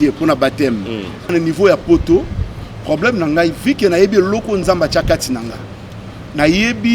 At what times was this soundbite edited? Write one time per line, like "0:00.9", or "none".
0:01.3

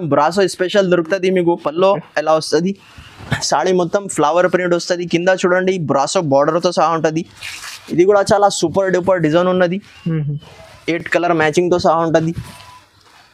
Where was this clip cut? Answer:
none

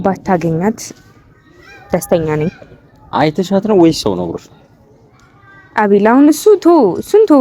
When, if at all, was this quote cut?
none

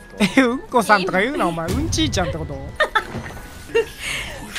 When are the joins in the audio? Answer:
0:03.6

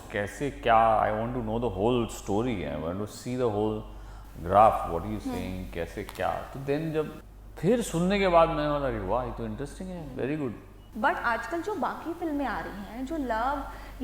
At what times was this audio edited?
0:07.2
0:10.8

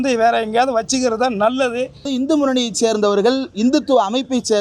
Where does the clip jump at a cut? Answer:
0:02.1

